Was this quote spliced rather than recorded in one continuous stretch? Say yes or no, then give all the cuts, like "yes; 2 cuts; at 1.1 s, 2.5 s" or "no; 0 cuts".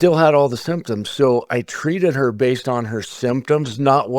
no; 0 cuts